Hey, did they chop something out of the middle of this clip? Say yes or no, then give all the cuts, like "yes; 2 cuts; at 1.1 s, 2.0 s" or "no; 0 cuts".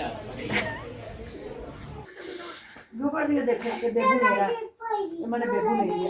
yes; 1 cut; at 2.0 s